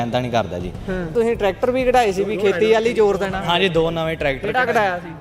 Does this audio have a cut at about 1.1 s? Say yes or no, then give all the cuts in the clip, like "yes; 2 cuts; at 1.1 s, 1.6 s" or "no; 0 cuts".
yes; 1 cut; at 1.1 s